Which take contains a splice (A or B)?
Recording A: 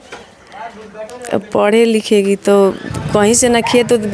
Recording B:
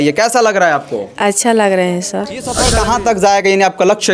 B